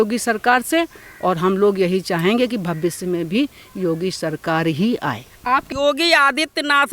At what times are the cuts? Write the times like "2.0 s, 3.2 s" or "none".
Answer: 5.6 s

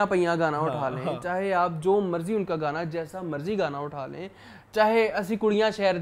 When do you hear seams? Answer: 1.2 s

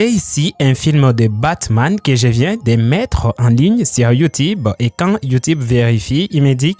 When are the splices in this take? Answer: none

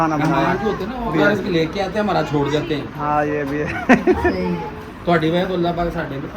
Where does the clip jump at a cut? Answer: 1.1 s

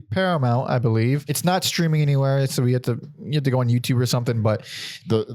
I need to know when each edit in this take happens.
1.3 s

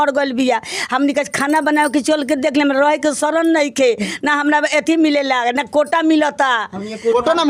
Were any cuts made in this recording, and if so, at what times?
none

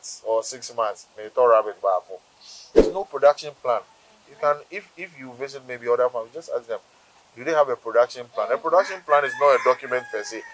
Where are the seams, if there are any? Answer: 2.8 s

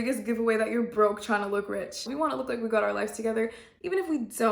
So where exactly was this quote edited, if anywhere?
2.1 s

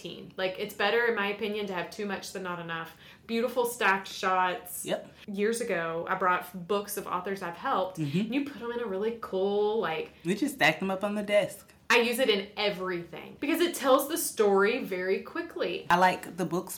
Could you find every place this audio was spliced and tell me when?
5.2 s, 13.3 s, 15.9 s

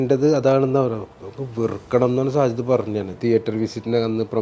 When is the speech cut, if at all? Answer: 3.1 s

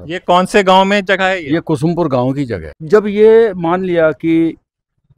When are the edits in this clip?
2.7 s

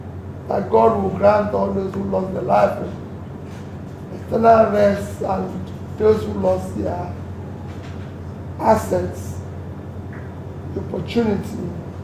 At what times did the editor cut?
none

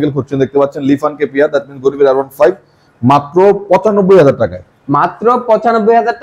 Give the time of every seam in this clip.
none

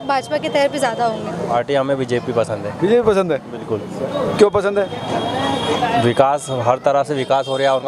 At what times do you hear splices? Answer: 1.4 s

